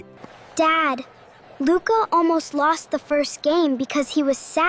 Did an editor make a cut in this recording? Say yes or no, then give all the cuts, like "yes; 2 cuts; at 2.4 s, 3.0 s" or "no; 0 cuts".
no; 0 cuts